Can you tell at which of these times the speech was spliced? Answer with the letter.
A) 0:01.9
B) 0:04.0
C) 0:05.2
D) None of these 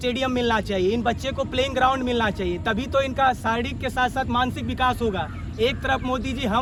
D